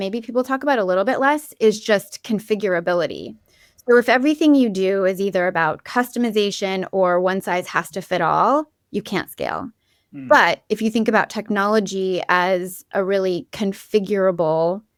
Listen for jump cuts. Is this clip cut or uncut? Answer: uncut